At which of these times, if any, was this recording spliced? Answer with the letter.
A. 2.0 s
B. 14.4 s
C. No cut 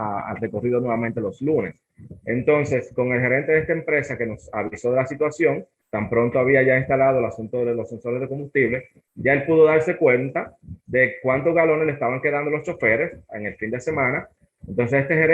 B